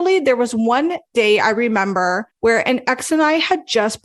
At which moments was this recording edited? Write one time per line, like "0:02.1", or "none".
0:01.0
0:02.3